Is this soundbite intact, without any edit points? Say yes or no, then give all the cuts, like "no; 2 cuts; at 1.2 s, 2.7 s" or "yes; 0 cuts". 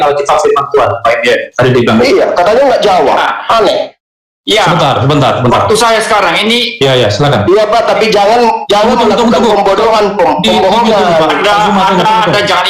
yes; 0 cuts